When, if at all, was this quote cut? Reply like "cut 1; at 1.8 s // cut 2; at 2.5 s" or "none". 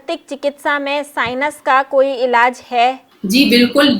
cut 1; at 3.1 s